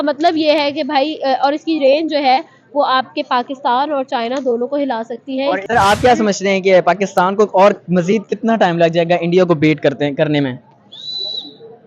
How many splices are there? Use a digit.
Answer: 1